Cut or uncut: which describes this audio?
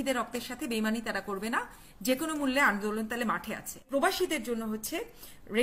cut